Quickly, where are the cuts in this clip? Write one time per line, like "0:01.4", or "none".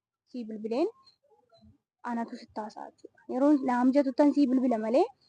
none